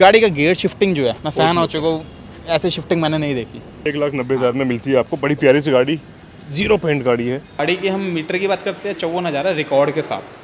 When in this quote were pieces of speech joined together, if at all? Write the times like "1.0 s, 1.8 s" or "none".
1.2 s, 3.7 s, 7.6 s